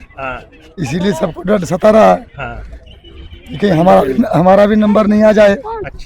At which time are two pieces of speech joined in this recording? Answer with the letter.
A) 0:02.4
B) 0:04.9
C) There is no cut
C